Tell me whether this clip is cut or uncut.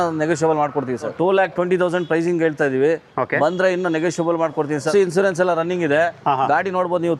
cut